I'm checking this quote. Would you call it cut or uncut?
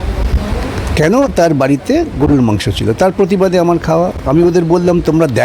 uncut